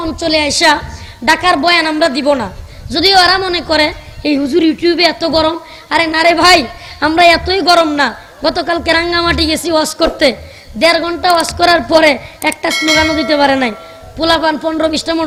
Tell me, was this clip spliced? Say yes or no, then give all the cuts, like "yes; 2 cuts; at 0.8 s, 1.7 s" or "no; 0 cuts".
no; 0 cuts